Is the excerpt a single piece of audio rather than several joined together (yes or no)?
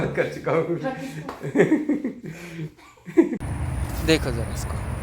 no